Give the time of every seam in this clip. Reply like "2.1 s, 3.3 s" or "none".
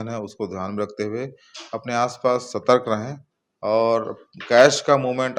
none